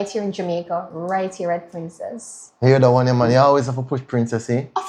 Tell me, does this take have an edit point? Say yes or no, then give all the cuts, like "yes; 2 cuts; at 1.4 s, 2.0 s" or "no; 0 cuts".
no; 0 cuts